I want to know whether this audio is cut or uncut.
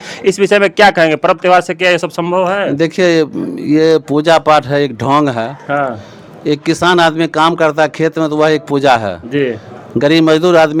uncut